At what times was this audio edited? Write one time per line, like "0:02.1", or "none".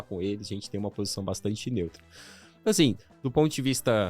none